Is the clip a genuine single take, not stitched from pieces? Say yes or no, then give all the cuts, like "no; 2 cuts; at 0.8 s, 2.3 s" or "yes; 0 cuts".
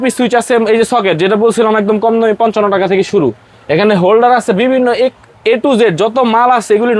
yes; 0 cuts